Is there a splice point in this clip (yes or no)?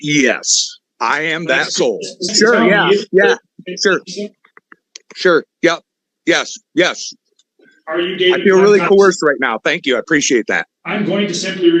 yes